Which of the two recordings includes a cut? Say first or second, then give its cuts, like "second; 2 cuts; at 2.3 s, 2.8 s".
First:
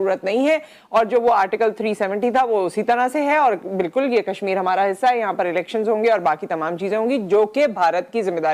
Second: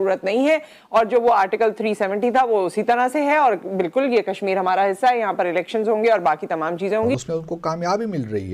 second; 1 cut; at 7.2 s